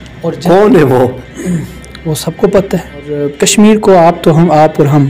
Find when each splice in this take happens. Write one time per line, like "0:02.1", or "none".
0:03.3

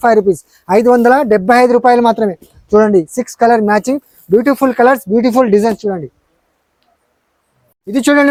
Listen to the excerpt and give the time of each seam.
none

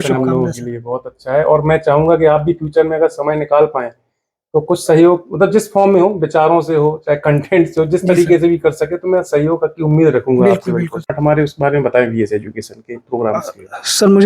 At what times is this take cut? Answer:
0:11.1

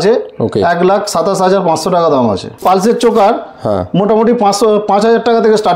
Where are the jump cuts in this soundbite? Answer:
0:02.6

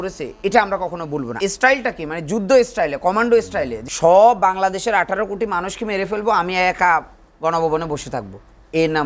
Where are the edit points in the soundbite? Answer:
0:01.3
0:03.8

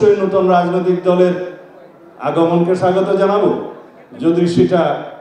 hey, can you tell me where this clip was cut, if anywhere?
none

